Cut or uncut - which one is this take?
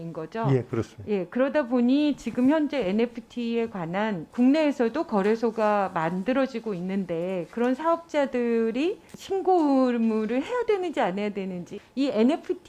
cut